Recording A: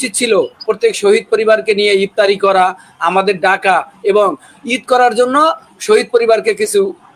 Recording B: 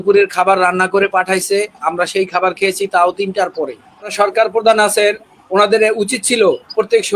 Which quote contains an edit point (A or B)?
B